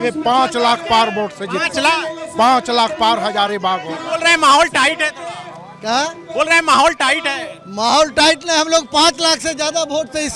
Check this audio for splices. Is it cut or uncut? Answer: uncut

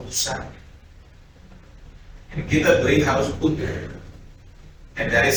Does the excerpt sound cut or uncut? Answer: uncut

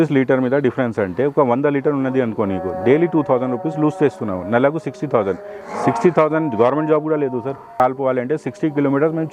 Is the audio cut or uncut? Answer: cut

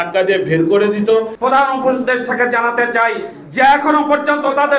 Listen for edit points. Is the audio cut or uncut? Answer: cut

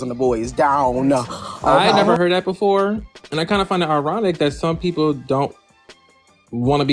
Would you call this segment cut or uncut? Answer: cut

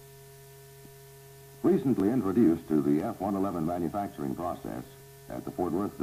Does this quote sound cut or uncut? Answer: uncut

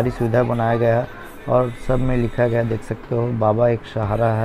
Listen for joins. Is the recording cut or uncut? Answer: uncut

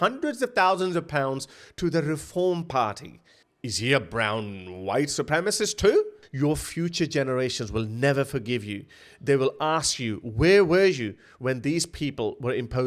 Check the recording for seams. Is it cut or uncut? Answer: cut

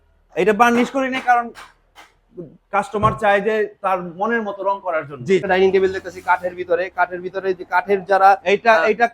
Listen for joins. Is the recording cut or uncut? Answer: cut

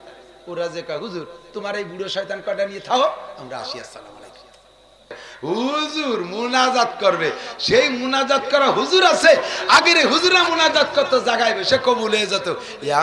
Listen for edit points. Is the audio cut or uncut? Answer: cut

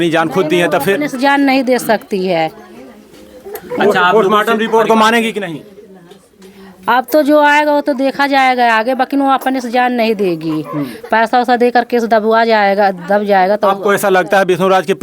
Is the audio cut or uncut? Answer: uncut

